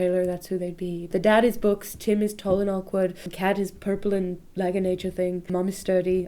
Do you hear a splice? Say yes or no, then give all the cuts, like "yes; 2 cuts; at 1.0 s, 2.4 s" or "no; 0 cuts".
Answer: yes; 3 cuts; at 1.1 s, 3.3 s, 5.5 s